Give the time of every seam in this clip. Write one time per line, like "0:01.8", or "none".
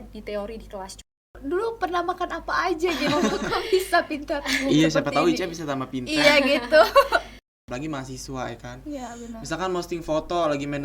0:01.4
0:07.6